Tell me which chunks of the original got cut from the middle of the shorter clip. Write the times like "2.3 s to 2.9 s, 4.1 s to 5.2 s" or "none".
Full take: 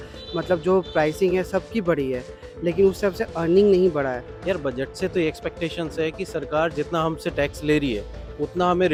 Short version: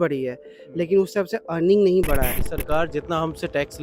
4.3 s to 6.3 s